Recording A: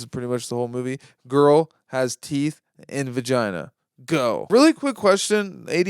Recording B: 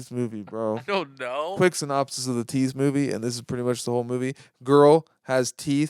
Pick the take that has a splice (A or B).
A